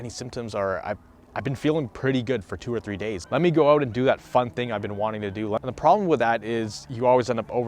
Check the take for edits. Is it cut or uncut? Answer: cut